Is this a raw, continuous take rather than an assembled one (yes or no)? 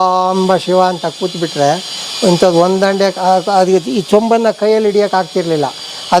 yes